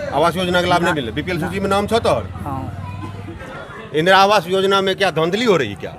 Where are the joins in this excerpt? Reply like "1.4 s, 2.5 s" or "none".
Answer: 3.4 s